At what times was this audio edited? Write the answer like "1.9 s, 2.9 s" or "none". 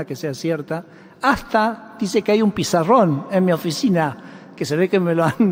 none

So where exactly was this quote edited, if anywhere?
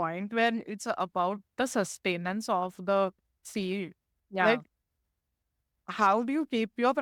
none

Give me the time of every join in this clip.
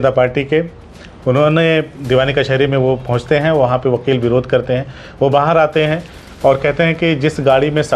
1.9 s

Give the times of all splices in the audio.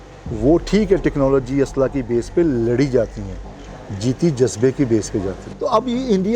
5.4 s

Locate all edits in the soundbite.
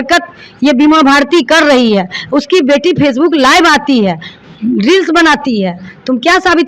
none

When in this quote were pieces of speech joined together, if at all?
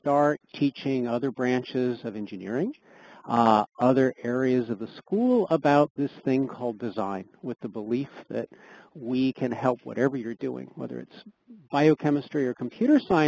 11.5 s

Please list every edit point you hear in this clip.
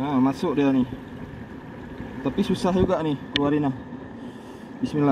none

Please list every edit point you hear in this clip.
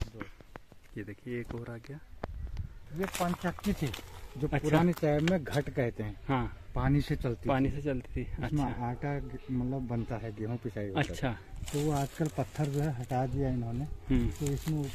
2.9 s

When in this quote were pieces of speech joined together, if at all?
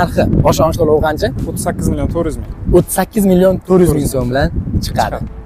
none

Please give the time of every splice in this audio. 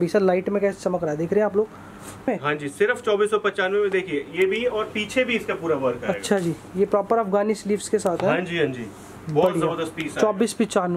2.3 s

